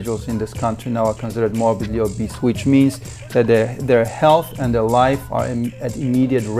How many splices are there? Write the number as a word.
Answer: zero